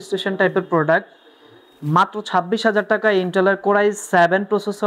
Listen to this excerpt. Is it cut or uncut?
uncut